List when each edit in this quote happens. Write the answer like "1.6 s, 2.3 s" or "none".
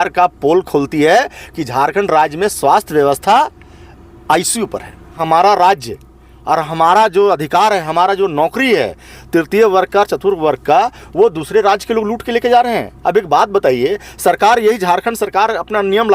5.2 s